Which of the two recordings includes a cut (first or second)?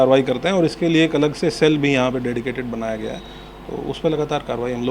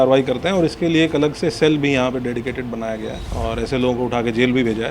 second